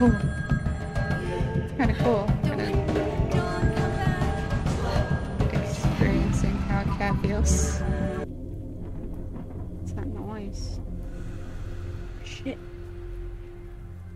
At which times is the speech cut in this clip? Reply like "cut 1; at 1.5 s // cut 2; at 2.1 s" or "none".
cut 1; at 8.2 s